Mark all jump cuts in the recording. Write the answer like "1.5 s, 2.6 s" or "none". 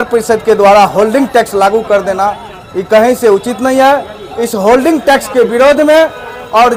none